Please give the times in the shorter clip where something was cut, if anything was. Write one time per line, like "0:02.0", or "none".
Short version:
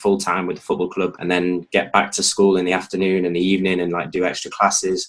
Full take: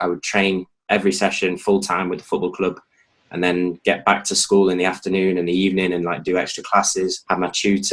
0:01.2